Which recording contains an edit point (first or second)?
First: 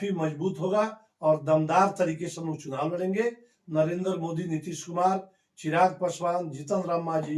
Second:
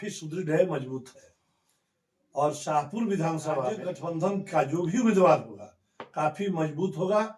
second